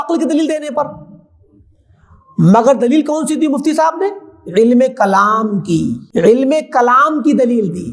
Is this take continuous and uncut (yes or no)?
no